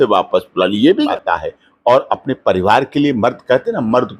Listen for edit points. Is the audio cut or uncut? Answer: cut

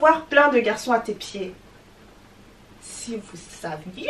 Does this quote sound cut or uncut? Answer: uncut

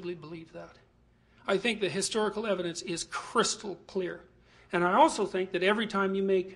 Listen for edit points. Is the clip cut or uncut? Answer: uncut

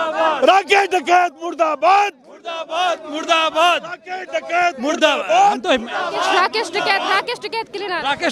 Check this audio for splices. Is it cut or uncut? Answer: uncut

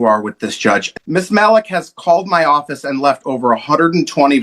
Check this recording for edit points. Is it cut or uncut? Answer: cut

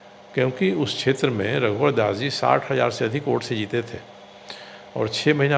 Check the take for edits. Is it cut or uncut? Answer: uncut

